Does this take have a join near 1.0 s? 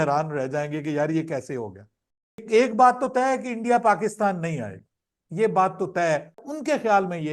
no; 2 cuts; at 2.4 s, 6.4 s

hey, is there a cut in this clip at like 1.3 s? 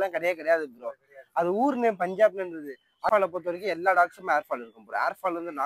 no; 1 cut; at 3.1 s

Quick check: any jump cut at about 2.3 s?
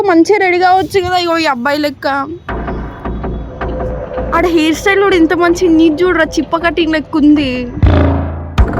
yes; 1 cut; at 2.3 s

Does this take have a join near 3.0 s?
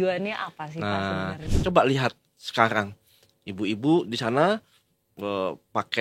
no; 1 cut; at 1.5 s

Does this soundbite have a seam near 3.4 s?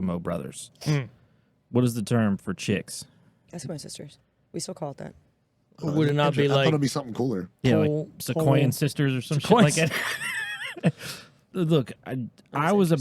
no; 1 cut; at 11.5 s

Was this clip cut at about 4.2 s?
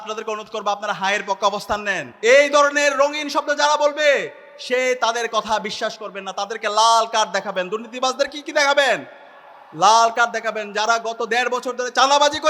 no; 1 cut; at 2.0 s

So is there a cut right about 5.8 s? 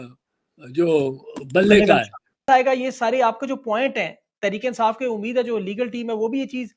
no; 1 cut; at 2.4 s

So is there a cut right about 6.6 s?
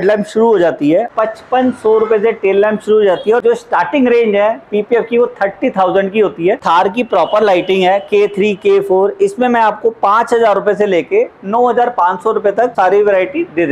yes; 4 cuts; at 1.1 s, 3.4 s, 6.6 s, 12.7 s

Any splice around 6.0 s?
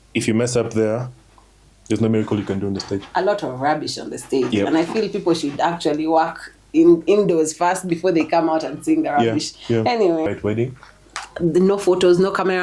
no; 1 cut; at 10.3 s

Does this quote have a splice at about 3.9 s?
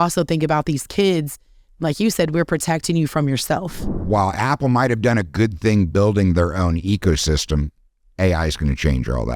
yes; 1 cut; at 3.9 s

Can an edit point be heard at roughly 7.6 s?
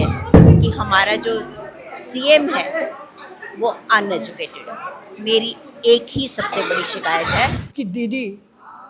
yes; 1 cut; at 7.6 s

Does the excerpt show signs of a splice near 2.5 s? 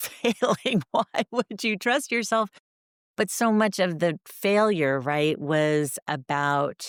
no; 0 cuts

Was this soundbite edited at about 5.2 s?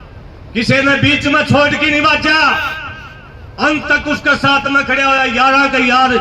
no; 0 cuts

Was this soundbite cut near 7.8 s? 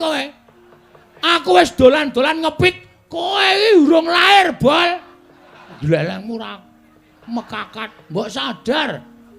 no; 1 cut; at 5.8 s

